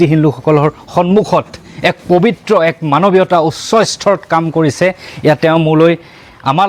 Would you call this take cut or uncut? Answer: uncut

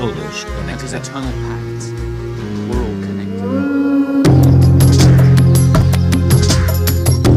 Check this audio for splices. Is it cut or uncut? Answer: uncut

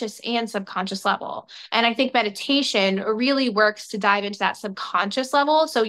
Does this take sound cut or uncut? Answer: uncut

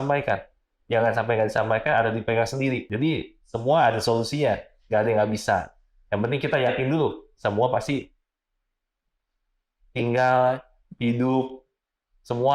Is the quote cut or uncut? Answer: cut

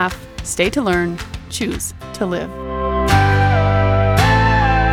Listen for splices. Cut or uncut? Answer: uncut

